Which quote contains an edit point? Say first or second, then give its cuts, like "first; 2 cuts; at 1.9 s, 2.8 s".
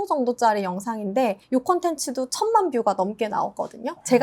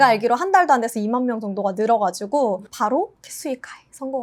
first; 1 cut; at 1.4 s